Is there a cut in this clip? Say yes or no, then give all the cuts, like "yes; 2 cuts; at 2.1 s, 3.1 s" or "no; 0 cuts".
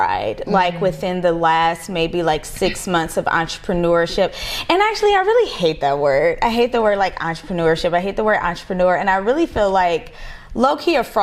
no; 0 cuts